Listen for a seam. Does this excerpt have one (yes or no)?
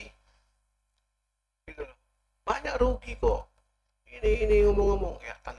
no